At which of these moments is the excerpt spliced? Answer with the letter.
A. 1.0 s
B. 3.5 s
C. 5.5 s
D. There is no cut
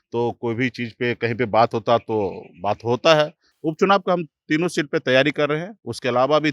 B